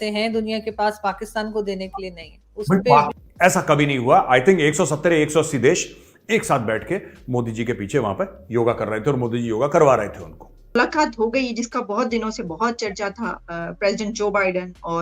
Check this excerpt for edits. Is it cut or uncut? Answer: cut